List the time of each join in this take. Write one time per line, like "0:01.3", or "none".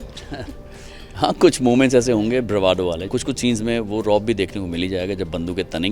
0:03.1